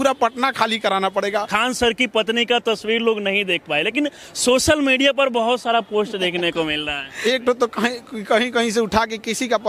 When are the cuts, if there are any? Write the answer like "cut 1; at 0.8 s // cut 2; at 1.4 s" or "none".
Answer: cut 1; at 1.5 s // cut 2; at 7.1 s